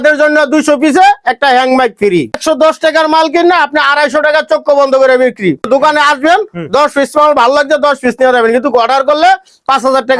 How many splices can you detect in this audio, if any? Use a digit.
2